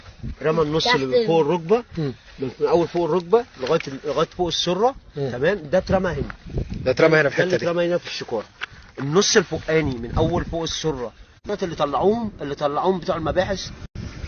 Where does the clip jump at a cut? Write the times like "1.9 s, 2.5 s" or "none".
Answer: none